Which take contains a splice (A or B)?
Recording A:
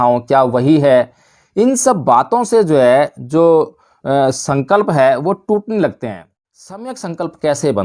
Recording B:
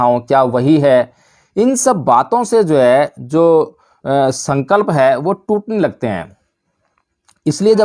A